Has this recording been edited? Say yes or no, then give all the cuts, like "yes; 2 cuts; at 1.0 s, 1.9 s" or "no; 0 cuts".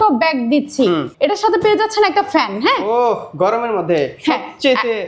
yes; 1 cut; at 1.1 s